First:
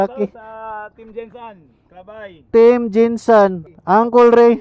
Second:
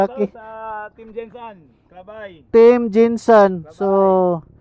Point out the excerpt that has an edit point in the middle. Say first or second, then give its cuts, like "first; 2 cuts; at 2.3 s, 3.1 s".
first; 1 cut; at 3.7 s